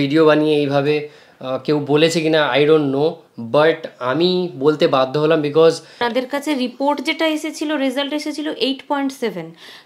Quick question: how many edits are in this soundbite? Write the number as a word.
one